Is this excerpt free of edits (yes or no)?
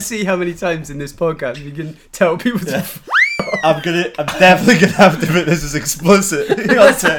yes